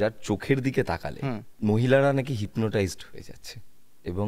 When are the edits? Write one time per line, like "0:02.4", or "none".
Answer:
0:01.5